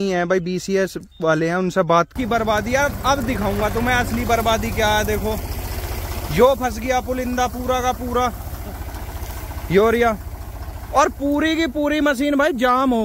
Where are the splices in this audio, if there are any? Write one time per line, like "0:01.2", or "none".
0:02.1